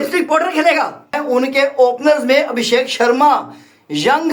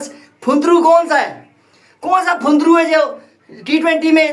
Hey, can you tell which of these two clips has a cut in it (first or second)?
first